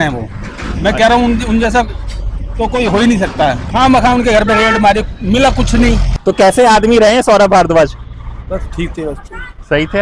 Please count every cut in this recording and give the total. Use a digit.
2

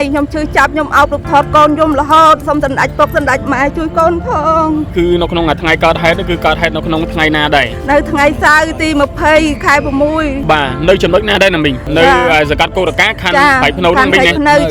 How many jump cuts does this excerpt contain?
2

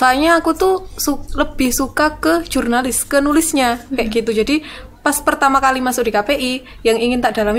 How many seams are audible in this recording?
0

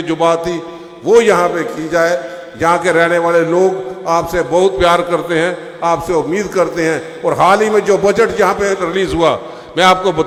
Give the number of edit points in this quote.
0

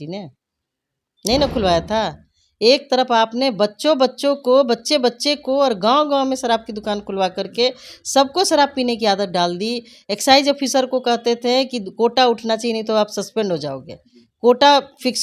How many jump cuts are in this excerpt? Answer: 0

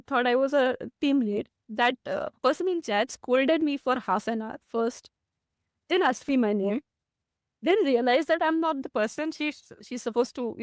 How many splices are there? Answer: 1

